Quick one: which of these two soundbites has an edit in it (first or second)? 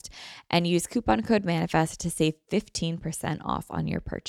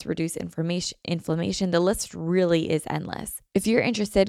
second